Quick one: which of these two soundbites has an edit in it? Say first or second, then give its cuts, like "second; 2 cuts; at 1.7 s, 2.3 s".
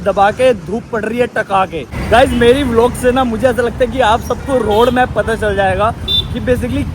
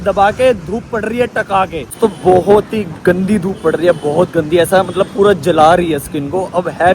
first; 1 cut; at 1.9 s